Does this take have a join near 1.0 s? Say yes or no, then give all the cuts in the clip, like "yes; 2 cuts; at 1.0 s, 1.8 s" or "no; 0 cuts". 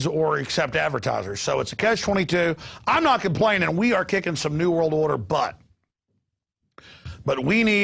no; 1 cut; at 2.3 s